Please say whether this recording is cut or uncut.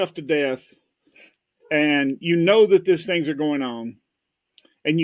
uncut